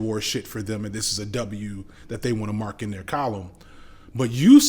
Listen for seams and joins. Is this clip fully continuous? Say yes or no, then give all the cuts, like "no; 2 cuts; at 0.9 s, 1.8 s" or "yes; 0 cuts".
yes; 0 cuts